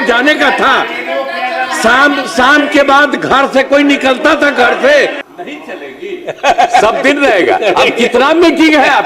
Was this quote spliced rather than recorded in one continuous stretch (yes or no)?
yes